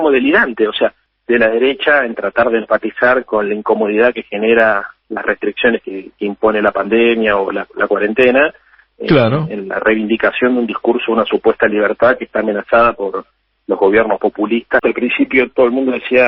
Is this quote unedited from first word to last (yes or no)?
no